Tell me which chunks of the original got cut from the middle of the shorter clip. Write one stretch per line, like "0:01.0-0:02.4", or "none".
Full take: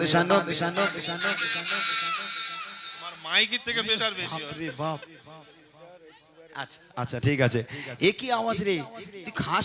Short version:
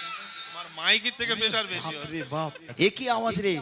0:05.1-0:07.8